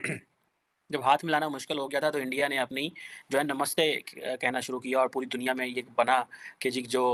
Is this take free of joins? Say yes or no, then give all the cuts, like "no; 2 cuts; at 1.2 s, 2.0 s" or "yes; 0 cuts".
yes; 0 cuts